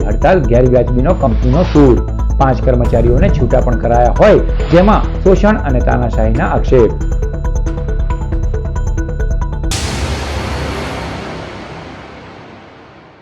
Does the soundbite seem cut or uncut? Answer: cut